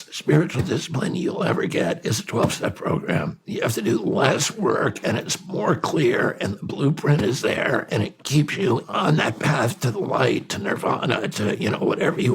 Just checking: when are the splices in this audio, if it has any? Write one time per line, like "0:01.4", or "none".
0:03.4
0:08.8